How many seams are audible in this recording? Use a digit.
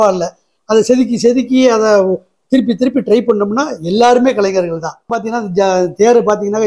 1